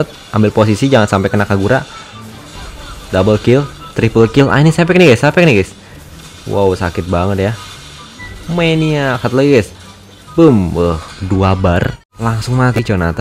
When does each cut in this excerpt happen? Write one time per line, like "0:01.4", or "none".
0:12.0